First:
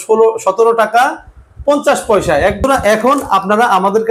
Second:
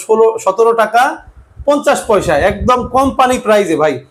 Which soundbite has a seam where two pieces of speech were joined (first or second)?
first